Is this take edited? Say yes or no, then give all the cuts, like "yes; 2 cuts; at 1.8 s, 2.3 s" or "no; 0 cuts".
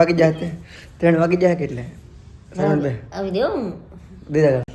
no; 0 cuts